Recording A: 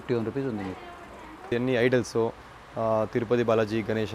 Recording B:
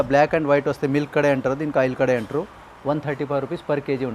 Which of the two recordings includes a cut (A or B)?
A